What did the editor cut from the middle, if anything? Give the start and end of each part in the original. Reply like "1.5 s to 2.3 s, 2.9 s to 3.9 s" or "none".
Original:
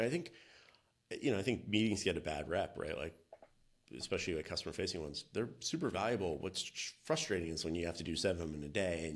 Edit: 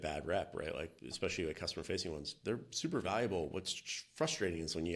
3.2 s to 3.9 s